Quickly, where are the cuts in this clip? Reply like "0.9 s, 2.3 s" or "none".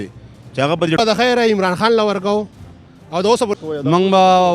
1.0 s, 3.6 s

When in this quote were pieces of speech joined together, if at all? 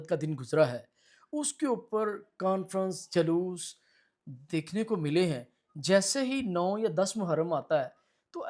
none

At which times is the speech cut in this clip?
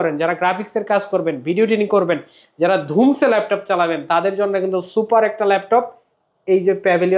none

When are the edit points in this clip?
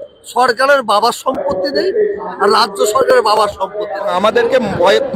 4.1 s

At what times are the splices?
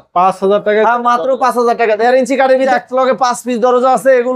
2.7 s

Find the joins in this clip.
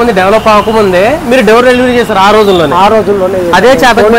none

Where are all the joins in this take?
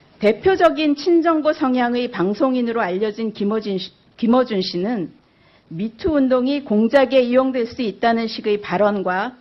1.9 s

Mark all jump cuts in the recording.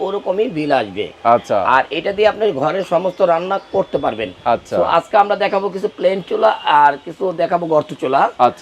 none

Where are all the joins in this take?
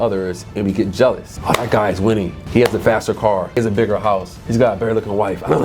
1.3 s, 2.4 s, 3.6 s, 4.3 s

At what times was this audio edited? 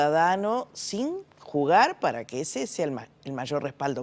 none

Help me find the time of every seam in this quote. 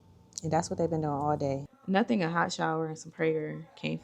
1.7 s

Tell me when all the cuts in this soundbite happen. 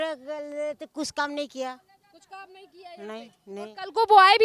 none

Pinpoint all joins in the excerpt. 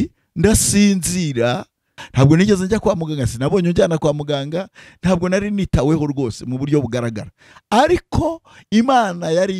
2.0 s

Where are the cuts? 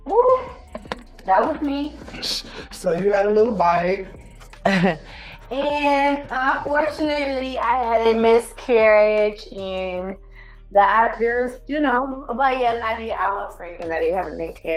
none

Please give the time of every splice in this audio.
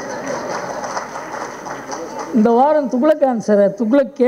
none

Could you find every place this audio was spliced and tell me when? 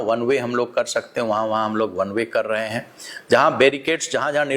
none

